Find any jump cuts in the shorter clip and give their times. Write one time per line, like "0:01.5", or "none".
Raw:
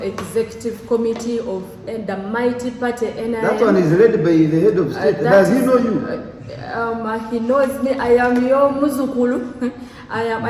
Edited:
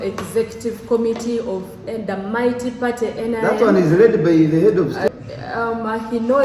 0:05.1